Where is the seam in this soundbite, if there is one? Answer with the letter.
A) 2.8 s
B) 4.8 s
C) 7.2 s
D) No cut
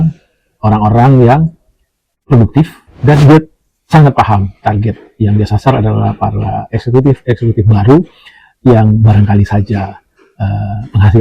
A